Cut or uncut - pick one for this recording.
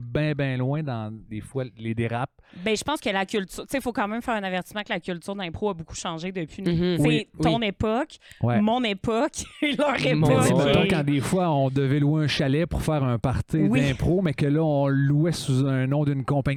uncut